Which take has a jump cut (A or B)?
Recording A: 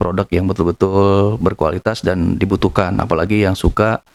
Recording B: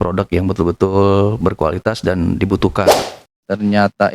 B